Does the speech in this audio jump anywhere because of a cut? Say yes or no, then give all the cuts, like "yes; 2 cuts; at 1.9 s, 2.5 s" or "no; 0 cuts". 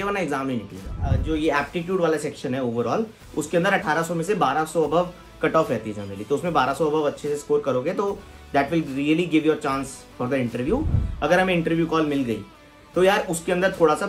yes; 3 cuts; at 1.2 s, 3.8 s, 11.0 s